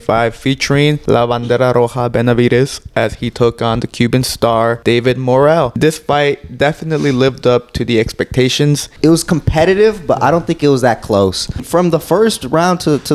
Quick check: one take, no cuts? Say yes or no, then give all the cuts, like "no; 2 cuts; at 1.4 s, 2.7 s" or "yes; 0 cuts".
no; 5 cuts; at 1.0 s, 4.8 s, 5.7 s, 8.9 s, 11.6 s